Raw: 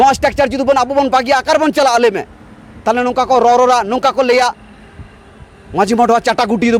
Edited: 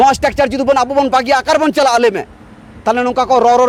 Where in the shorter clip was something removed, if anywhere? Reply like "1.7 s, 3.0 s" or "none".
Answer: none